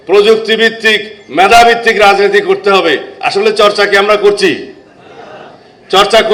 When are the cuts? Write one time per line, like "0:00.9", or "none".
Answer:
none